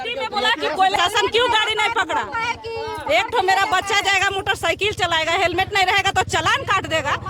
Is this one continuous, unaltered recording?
no; 1 cut; at 0.9 s

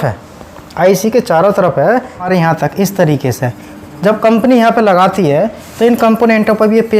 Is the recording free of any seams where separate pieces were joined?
no; 1 cut; at 2.3 s

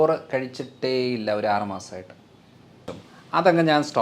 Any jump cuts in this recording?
yes; 1 cut; at 2.9 s

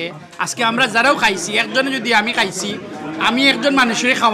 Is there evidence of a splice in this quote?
no; 0 cuts

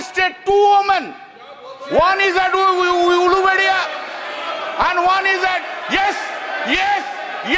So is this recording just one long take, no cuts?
yes; 0 cuts

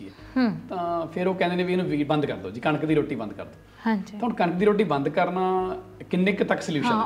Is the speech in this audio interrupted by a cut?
no; 0 cuts

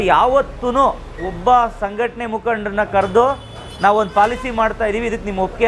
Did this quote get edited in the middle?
no; 0 cuts

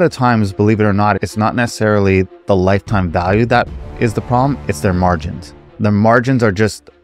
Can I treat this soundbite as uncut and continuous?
yes; 0 cuts

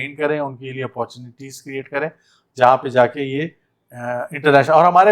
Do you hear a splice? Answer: no; 0 cuts

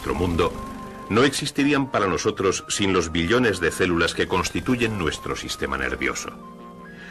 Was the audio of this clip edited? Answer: yes; 1 cut; at 3.7 s

